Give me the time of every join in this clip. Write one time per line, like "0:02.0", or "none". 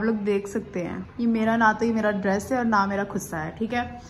0:01.0